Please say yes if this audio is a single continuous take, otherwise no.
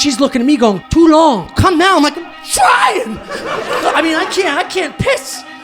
no